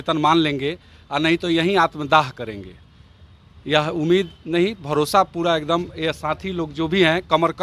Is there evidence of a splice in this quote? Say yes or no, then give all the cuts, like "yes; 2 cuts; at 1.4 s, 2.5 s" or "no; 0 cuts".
no; 0 cuts